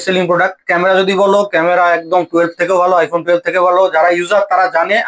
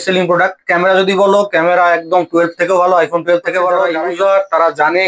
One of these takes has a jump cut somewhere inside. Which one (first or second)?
second